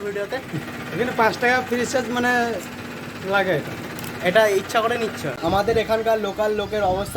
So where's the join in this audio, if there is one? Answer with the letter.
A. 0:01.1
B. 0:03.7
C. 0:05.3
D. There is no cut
C